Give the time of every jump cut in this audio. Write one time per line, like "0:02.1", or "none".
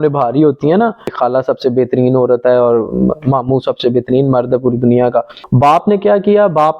0:01.0
0:05.4